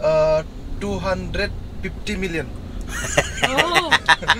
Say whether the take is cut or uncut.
cut